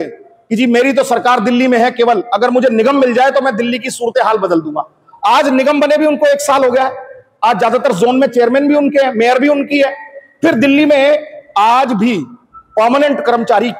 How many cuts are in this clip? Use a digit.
0